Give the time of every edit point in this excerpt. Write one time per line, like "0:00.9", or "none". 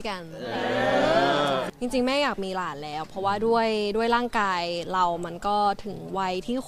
0:01.7